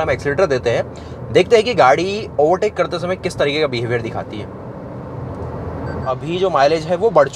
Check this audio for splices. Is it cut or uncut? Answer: cut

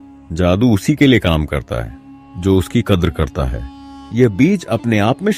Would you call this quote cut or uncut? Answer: uncut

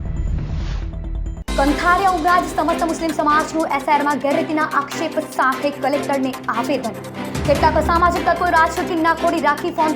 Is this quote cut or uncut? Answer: cut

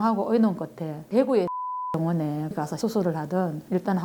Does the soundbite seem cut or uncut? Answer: cut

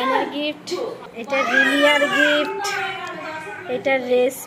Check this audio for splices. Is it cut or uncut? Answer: uncut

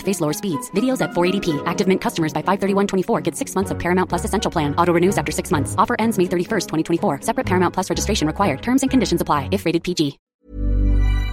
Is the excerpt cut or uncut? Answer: cut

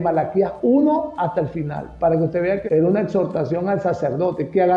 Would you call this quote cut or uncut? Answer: cut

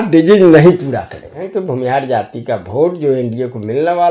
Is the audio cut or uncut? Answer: cut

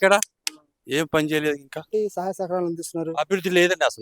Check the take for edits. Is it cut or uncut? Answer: cut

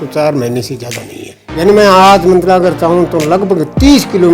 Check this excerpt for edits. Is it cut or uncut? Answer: cut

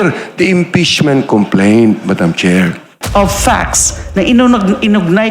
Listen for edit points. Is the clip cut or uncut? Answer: cut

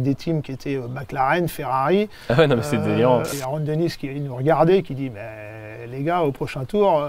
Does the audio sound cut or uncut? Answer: cut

